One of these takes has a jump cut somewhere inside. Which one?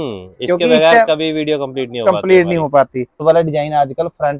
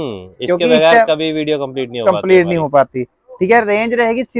first; 1 cut; at 3.2 s

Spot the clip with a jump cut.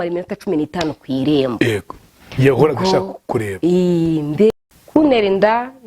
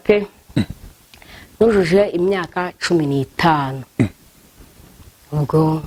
first; 1 cut; at 4.5 s

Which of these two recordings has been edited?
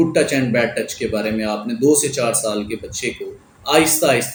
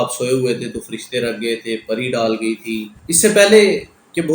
second; 1 cut; at 2.9 s

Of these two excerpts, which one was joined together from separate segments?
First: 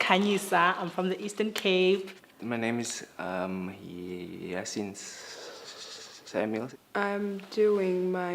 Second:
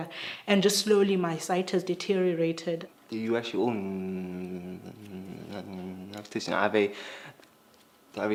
first; 1 cut; at 5.9 s

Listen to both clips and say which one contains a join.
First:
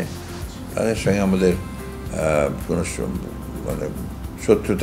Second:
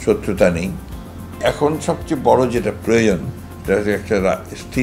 second; 1 cut; at 1.4 s

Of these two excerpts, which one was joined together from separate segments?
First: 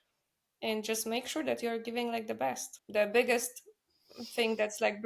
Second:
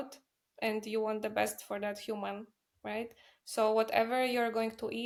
first; 1 cut; at 2.8 s

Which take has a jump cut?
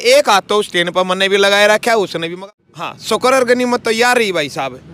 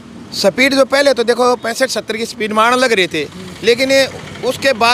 first; 1 cut; at 2.3 s

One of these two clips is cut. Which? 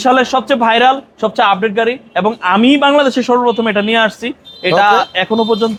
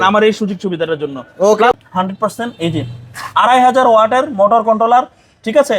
second; 1 cut; at 1.7 s

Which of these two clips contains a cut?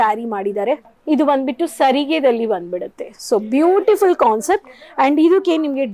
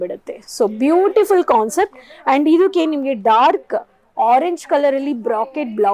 first; 1 cut; at 0.9 s

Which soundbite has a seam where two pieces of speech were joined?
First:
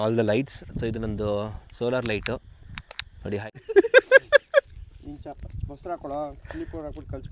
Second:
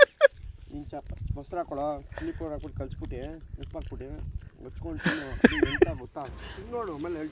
first; 1 cut; at 3.4 s

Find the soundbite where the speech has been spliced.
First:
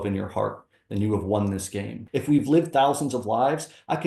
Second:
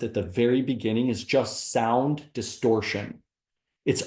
first; 1 cut; at 2.0 s

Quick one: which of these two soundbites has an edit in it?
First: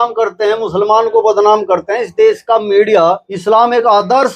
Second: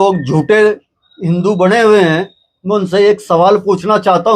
first; 1 cut; at 3.3 s

